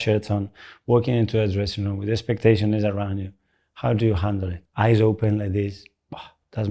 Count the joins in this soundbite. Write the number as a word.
one